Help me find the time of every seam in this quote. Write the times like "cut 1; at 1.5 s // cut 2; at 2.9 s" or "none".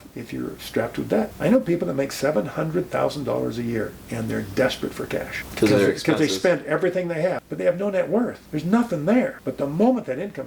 cut 1; at 1.3 s // cut 2; at 5.4 s // cut 3; at 7.5 s // cut 4; at 8.4 s // cut 5; at 9.4 s